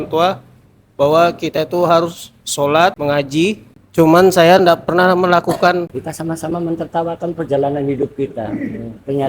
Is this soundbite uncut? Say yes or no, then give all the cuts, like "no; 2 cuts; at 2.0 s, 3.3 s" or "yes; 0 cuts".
no; 2 cuts; at 3.7 s, 5.9 s